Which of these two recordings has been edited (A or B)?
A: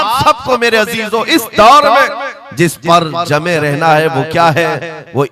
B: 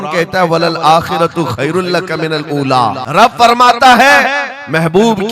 B